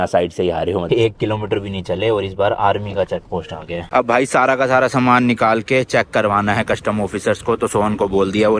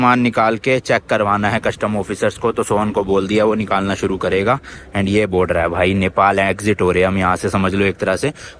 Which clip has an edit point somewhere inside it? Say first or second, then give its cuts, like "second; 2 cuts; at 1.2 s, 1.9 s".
first; 2 cuts; at 0.8 s, 3.8 s